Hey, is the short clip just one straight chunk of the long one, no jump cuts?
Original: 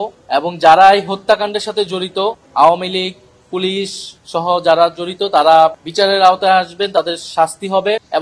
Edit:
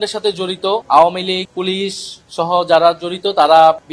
no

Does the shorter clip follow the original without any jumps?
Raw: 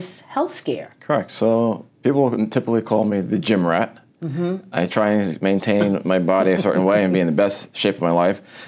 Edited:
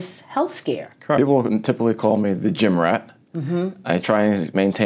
no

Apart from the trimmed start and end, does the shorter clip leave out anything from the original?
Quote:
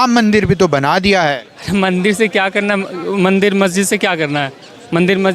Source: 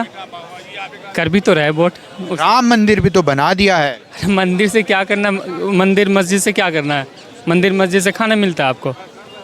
no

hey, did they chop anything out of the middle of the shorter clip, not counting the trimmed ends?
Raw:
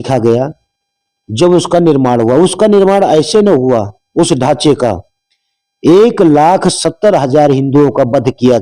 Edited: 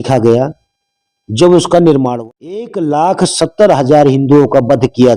yes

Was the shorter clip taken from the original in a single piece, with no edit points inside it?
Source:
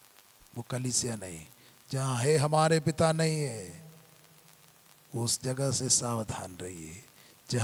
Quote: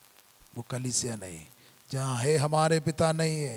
yes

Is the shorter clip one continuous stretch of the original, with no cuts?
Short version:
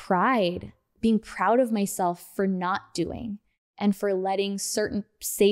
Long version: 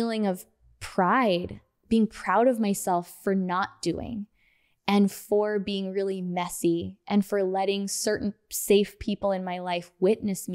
no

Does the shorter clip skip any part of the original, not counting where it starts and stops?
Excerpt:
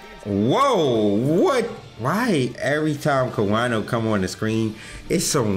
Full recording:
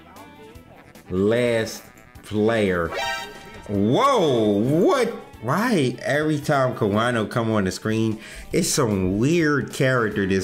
no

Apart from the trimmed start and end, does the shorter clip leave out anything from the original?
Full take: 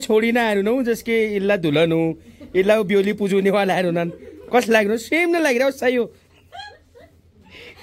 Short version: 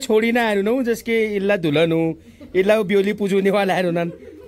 no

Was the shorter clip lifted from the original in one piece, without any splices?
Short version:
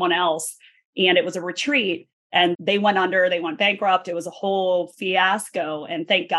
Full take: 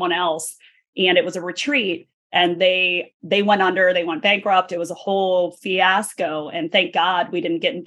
no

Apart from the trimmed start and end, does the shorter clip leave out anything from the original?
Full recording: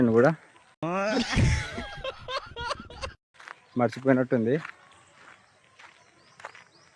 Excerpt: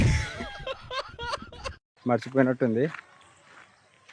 yes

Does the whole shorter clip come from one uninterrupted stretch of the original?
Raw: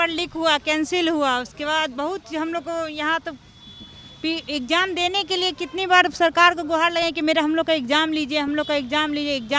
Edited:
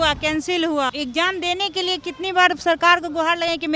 no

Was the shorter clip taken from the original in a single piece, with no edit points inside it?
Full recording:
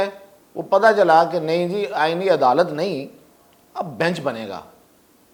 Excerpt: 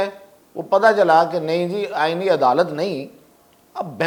yes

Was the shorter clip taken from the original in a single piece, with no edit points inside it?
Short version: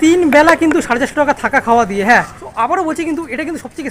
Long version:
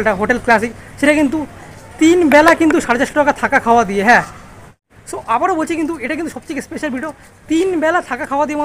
no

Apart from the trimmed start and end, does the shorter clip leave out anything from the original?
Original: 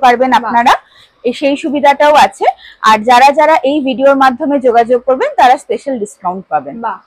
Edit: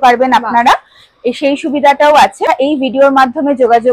yes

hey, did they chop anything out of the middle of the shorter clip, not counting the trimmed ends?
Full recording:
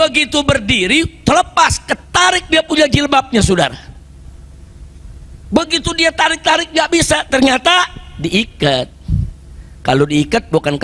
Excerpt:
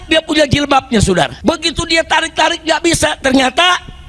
yes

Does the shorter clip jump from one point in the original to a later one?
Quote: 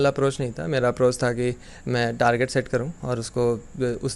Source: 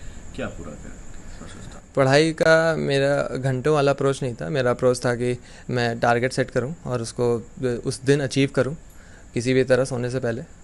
no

